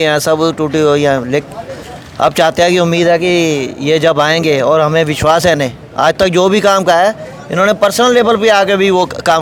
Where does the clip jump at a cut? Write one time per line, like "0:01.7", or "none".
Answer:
none

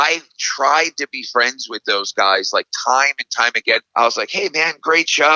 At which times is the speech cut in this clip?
0:03.9

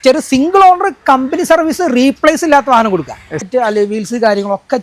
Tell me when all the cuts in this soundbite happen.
0:03.5

